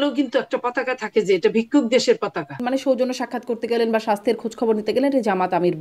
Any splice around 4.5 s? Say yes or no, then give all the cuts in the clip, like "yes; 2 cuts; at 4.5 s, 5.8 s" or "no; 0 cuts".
no; 1 cut; at 2.6 s